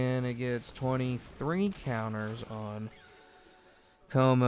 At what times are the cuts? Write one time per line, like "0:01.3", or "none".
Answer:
none